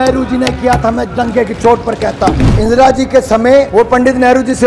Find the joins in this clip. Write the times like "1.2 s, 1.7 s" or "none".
2.5 s, 3.7 s